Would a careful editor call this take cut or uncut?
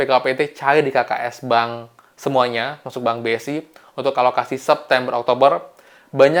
uncut